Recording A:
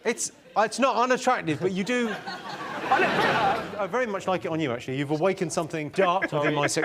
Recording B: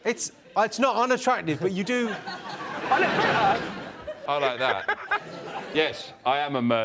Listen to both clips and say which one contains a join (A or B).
A